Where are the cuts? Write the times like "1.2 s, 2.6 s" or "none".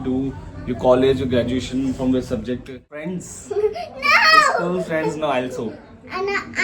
3.1 s